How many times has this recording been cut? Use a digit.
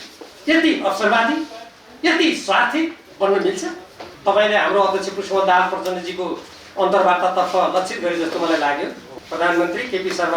2